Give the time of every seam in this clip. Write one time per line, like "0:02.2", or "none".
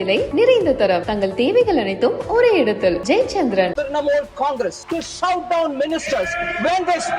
0:03.7
0:04.8